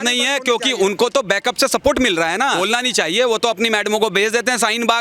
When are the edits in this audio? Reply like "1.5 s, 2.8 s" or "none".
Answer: 2.6 s